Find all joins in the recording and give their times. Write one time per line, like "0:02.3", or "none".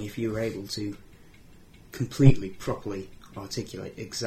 none